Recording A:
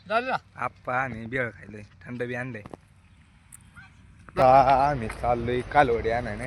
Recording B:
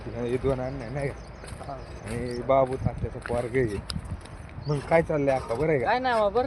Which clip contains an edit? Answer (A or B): A